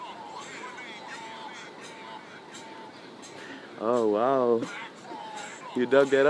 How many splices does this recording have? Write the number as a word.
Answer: zero